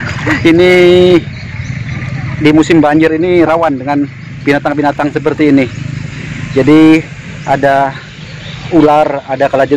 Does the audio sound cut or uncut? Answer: uncut